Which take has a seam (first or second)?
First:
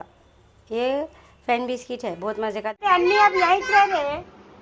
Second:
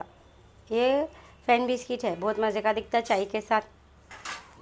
first